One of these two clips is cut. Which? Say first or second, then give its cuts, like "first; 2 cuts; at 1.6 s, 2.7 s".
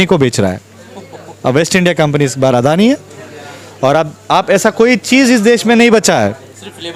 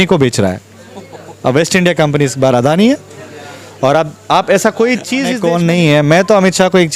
second; 1 cut; at 5.2 s